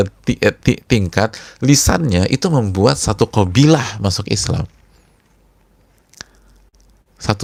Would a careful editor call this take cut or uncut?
uncut